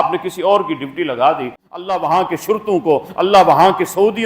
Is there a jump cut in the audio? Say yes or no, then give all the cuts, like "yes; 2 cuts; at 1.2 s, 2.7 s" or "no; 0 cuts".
yes; 1 cut; at 1.6 s